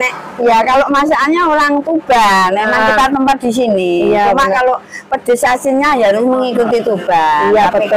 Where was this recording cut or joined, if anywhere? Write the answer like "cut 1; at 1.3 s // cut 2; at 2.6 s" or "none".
none